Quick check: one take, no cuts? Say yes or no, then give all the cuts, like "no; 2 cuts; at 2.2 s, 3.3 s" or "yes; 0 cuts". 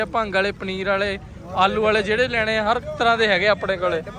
yes; 0 cuts